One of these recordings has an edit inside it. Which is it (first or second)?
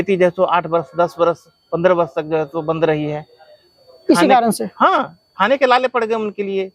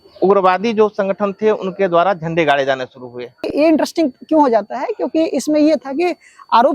second